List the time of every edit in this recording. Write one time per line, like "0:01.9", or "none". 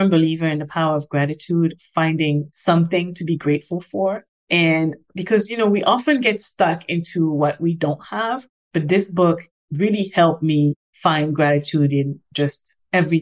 0:02.5